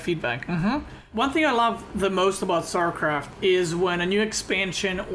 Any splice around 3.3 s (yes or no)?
no